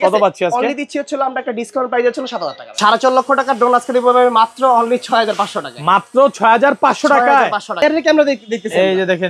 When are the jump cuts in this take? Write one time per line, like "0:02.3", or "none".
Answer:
0:02.6
0:07.8

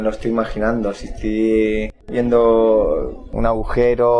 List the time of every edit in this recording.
0:02.0
0:03.2

